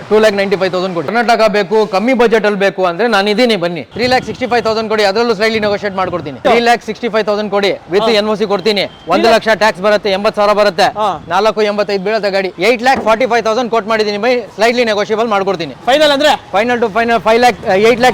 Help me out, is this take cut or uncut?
cut